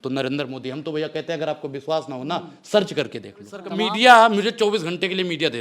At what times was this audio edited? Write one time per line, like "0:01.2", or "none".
0:03.7